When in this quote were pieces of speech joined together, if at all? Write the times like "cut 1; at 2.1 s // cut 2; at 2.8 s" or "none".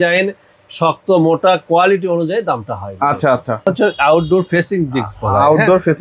cut 1; at 3.7 s